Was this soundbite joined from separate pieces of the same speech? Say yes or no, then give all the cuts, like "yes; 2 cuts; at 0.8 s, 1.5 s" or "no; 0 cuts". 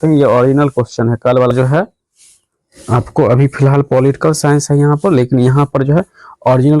yes; 1 cut; at 1.5 s